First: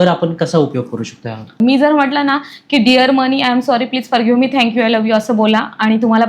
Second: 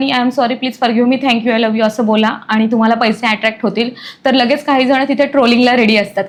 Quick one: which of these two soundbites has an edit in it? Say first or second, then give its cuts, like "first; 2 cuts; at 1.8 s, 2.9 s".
first; 1 cut; at 1.5 s